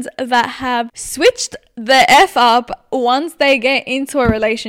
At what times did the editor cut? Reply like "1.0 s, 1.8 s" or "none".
1.0 s